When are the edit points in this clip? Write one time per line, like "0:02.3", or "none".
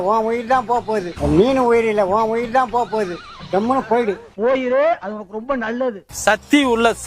0:01.1
0:03.1
0:06.1